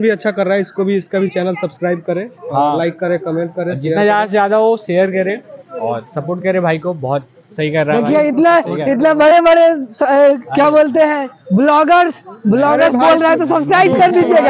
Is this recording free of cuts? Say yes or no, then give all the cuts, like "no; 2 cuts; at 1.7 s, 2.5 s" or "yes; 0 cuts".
yes; 0 cuts